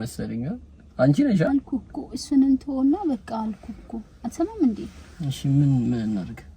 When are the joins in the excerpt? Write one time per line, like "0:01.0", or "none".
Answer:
0:01.5